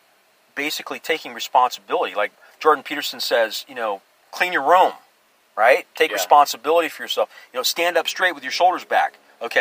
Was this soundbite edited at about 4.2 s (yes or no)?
yes